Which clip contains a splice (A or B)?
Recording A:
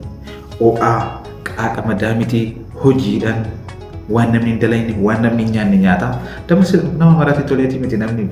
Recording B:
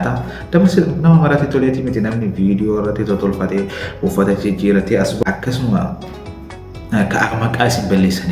B